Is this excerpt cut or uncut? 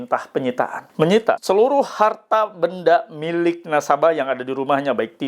cut